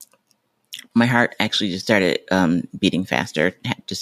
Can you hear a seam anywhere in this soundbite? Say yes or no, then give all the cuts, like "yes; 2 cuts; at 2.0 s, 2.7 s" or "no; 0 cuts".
no; 0 cuts